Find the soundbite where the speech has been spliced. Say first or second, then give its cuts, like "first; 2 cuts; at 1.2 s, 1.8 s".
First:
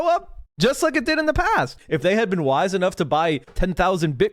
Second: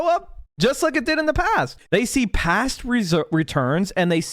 second; 1 cut; at 1.8 s